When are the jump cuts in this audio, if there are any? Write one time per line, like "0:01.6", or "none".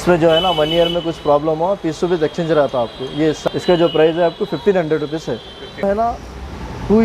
0:03.4
0:05.8